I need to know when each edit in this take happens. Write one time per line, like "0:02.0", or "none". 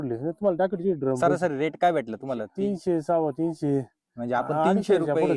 0:01.2